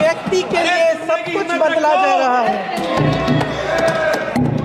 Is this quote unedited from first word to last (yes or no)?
yes